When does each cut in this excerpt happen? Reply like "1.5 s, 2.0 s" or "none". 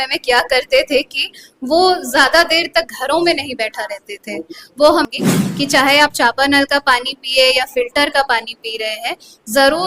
5.0 s